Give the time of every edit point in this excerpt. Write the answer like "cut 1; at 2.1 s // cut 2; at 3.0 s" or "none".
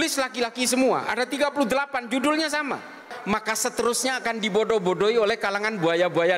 cut 1; at 3.1 s

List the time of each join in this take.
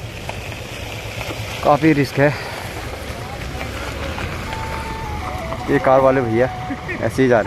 none

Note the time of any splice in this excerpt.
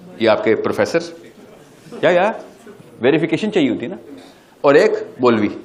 none

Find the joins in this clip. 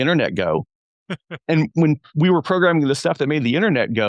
cut 1; at 1.7 s

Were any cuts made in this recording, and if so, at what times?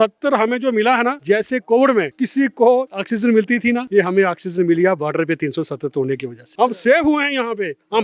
cut 1; at 1.2 s // cut 2; at 2.2 s // cut 3; at 3.3 s // cut 4; at 6.4 s

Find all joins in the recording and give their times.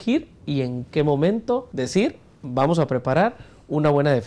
cut 1; at 1.7 s

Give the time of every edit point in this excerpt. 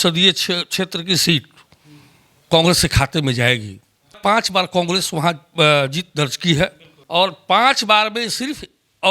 cut 1; at 4.5 s // cut 2; at 7.4 s

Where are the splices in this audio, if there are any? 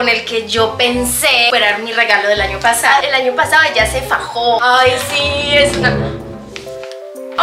cut 1; at 3.0 s // cut 2; at 4.6 s

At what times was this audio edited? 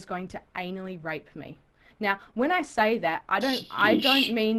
none

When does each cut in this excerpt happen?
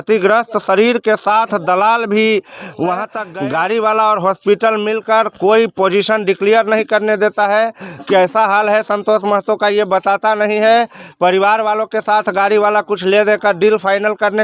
cut 1; at 3.2 s

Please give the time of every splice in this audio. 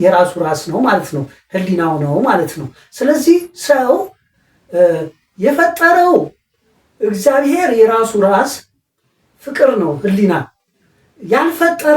none

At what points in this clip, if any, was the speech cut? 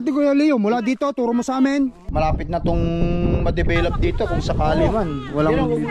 cut 1; at 2.0 s

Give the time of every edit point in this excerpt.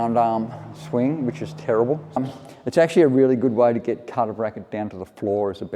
cut 1; at 2.2 s

